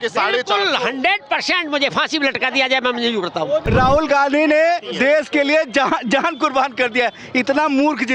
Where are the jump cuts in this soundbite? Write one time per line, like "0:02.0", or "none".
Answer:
0:03.7